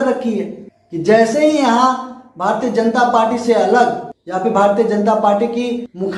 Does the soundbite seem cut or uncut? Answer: uncut